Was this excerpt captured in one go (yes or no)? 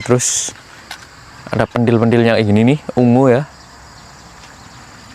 yes